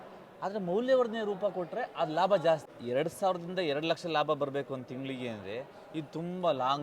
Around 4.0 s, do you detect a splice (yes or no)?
no